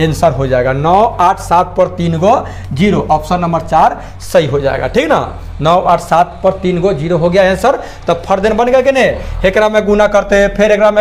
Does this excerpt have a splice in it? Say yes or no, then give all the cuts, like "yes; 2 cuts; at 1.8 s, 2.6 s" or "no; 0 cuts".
no; 0 cuts